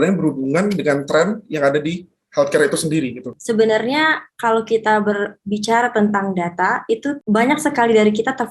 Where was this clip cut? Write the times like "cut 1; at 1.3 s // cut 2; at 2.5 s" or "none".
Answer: cut 1; at 3.3 s // cut 2; at 7.2 s